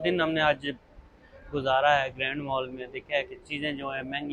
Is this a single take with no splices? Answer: yes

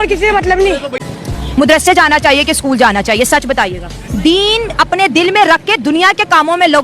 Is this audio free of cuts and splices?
no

